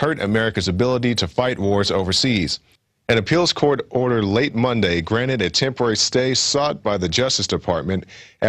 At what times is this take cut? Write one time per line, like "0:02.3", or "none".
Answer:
0:02.4